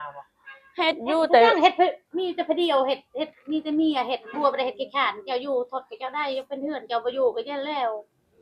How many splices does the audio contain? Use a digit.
0